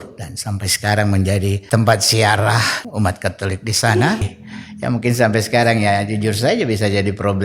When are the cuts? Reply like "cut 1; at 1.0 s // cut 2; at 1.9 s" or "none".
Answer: cut 1; at 1.6 s // cut 2; at 2.8 s // cut 3; at 4.2 s

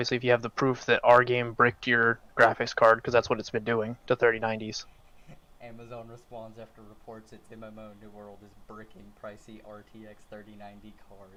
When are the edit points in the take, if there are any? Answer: none

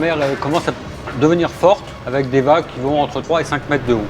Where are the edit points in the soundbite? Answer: cut 1; at 1.9 s // cut 2; at 3.2 s

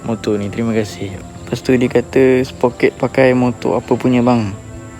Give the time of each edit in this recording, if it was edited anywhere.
cut 1; at 1.1 s

